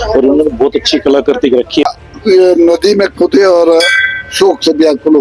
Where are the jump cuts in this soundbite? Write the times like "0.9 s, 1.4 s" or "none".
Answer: 1.8 s